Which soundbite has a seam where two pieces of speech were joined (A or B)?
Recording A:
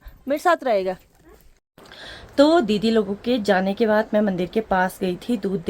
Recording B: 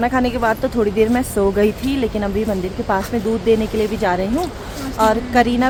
A